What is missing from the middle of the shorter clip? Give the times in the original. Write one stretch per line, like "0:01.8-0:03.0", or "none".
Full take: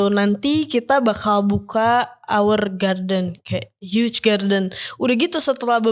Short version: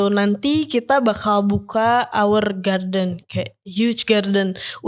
0:02.1-0:02.2